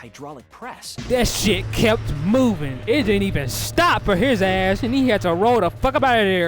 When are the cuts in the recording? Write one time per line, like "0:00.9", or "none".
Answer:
0:01.0